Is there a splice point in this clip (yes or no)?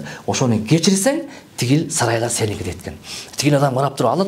no